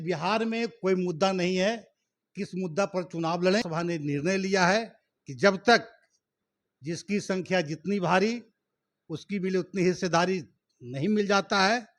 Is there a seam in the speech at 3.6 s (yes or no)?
yes